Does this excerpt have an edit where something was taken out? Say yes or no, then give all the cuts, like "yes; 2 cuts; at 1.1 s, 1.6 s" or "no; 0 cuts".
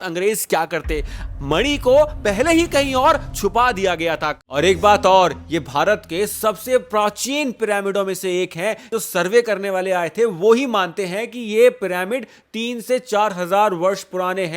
yes; 1 cut; at 4.4 s